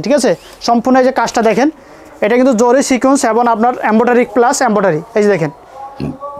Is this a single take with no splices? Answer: yes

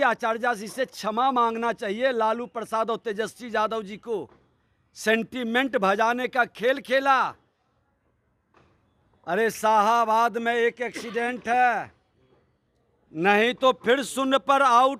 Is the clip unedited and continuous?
yes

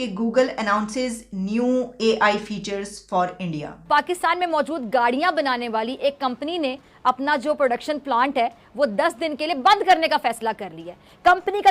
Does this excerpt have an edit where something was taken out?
yes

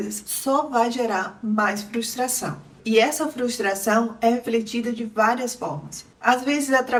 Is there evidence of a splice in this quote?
no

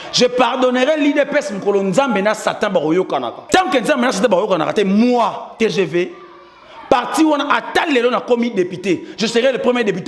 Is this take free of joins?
no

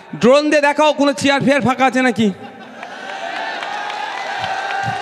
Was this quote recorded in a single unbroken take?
yes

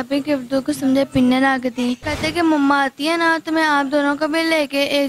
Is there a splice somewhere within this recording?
yes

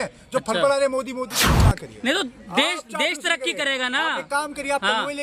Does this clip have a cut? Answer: yes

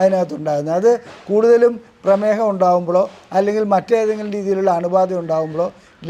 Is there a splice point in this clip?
no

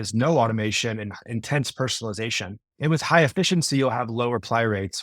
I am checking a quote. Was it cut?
yes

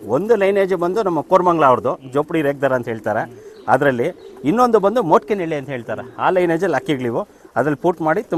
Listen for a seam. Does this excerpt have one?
no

